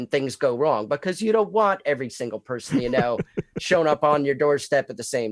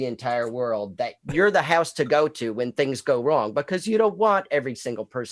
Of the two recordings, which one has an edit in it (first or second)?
second